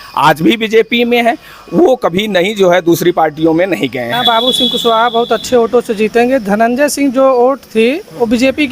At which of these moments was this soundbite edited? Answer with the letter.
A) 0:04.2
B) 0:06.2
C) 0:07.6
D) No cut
A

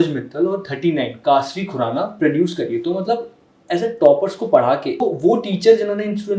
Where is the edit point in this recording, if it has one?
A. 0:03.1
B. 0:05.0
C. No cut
B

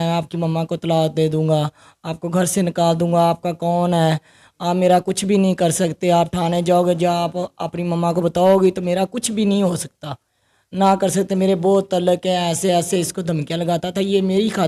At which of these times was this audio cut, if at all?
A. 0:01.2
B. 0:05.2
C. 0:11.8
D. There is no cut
D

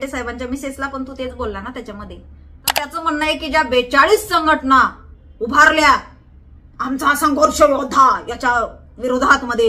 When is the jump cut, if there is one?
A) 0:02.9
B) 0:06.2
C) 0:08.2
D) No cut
A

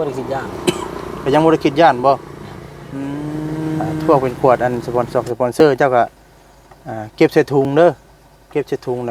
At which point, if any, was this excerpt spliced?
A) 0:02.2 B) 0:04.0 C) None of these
B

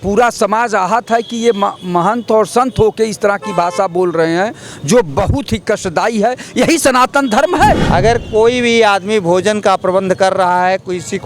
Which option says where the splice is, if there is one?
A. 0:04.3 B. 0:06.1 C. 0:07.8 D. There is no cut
C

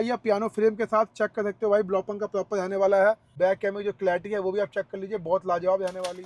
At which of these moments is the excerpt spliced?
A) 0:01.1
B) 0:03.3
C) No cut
B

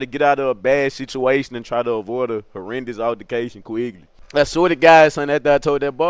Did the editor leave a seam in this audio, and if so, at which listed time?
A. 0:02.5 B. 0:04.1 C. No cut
B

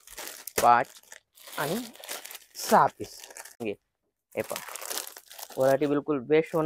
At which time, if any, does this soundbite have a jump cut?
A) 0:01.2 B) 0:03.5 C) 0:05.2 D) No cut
B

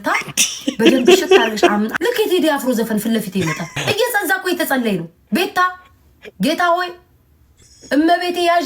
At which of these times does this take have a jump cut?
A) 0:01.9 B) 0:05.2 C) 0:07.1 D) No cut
A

